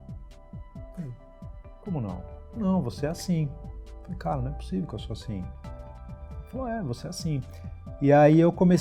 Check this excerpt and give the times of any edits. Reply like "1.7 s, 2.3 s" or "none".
none